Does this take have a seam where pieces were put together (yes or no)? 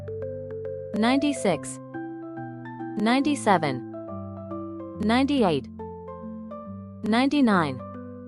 no